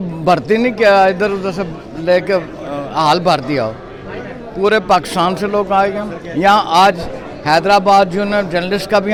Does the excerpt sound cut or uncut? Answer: uncut